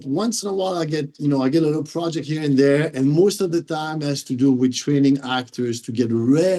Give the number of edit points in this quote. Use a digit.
0